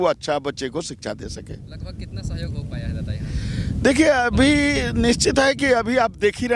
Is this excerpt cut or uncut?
uncut